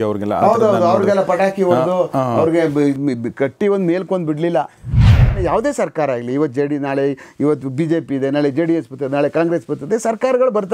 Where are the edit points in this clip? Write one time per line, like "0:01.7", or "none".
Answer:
0:05.3

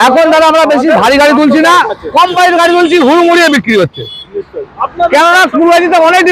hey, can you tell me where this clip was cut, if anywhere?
none

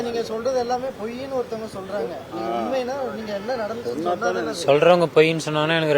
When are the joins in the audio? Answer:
none

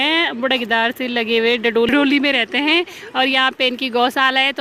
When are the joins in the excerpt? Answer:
none

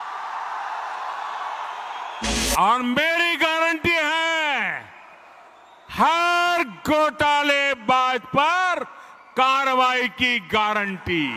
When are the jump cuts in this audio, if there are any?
0:02.3

